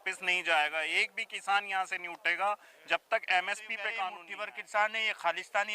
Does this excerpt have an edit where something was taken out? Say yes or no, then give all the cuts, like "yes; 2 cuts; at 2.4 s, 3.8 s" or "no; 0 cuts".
yes; 1 cut; at 4.2 s